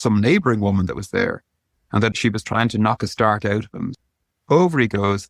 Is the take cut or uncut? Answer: cut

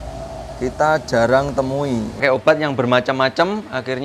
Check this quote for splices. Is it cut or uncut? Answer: cut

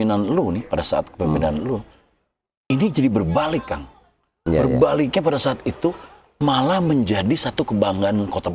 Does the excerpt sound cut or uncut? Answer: uncut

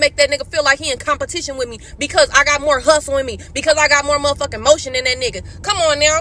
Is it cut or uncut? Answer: uncut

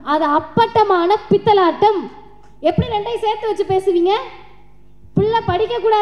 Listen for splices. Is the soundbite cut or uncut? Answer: uncut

